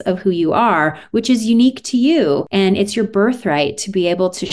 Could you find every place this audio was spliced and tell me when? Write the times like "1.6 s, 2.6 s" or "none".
2.5 s